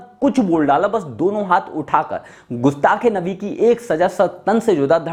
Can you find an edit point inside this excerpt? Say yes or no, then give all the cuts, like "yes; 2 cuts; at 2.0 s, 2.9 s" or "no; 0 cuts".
no; 0 cuts